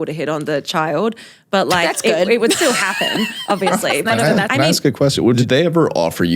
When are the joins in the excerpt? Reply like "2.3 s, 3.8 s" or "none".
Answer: 4.2 s, 5.4 s